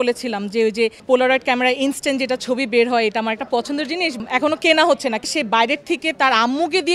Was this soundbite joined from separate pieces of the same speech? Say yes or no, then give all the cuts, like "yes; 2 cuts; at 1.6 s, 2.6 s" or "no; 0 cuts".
yes; 3 cuts; at 1.0 s, 4.2 s, 5.2 s